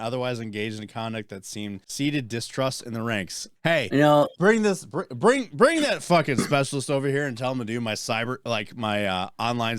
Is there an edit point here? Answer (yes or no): yes